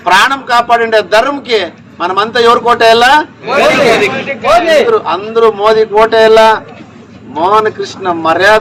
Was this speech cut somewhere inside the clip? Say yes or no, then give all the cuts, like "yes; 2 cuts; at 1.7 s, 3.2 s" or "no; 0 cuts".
no; 0 cuts